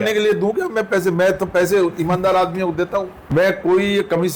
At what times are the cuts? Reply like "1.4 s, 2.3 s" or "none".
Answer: none